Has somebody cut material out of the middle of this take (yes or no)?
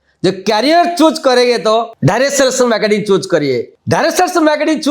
yes